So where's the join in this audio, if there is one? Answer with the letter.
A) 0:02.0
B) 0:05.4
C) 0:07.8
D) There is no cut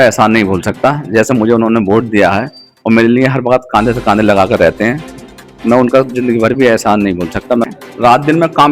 C